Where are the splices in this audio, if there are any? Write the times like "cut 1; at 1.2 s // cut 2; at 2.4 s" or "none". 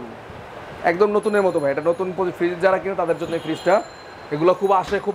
none